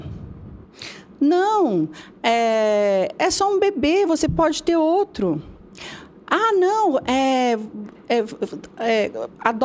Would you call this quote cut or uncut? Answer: uncut